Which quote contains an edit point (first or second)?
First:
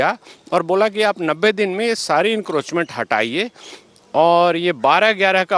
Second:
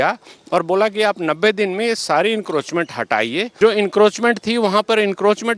second